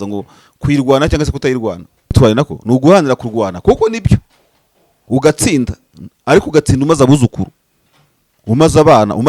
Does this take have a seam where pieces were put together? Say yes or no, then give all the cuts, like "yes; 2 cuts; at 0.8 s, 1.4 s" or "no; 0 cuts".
yes; 1 cut; at 2.1 s